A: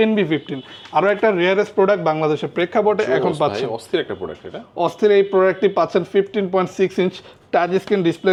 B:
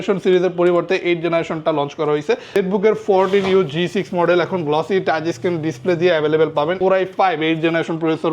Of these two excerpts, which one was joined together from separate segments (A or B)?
B